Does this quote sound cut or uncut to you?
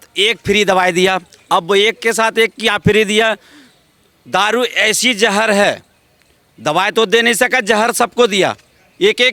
uncut